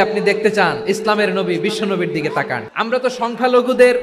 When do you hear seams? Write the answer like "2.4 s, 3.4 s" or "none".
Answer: 2.6 s